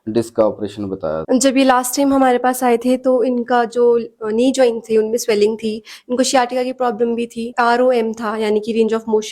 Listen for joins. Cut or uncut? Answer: cut